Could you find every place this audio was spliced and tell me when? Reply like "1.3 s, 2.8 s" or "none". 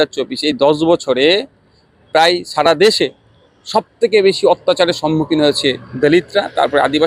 none